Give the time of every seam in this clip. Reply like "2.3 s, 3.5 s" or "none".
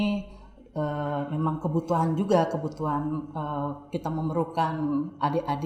none